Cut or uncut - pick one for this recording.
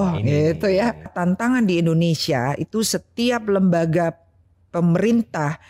cut